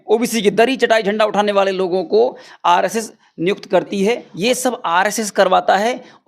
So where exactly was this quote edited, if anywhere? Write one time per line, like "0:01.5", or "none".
0:04.3